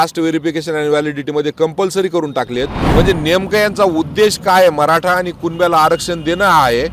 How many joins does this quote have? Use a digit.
1